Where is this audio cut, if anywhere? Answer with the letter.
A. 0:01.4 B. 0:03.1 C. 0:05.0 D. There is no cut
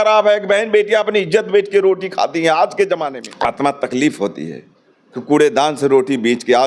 B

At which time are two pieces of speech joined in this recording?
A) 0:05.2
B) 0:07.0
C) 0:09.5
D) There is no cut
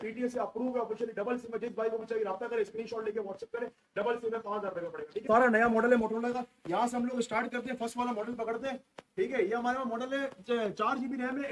A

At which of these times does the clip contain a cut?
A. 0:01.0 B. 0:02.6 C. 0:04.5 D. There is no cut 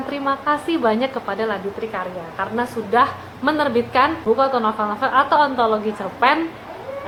D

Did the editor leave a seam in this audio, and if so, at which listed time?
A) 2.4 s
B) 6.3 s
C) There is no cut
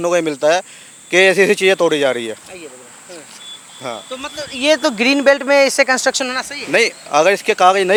C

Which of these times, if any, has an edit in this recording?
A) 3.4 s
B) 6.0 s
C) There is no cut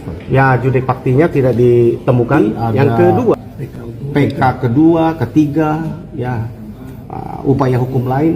A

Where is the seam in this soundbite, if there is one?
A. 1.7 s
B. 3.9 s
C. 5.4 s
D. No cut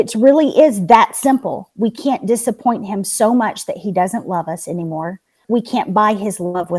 C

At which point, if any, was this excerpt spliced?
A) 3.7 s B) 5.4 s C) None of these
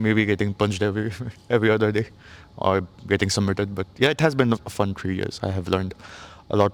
C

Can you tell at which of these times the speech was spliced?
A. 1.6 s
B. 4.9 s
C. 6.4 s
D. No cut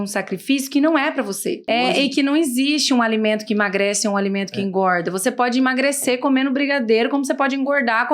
A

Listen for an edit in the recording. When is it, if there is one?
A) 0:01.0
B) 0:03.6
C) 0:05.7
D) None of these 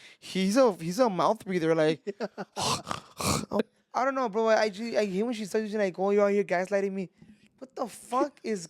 B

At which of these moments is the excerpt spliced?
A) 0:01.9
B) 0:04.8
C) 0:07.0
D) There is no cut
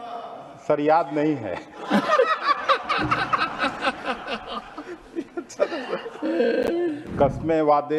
C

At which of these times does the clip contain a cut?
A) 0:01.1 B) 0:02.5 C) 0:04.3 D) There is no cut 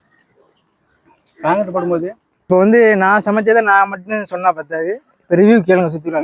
B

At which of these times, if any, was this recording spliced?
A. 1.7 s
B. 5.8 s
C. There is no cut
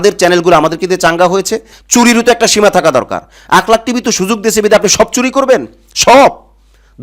A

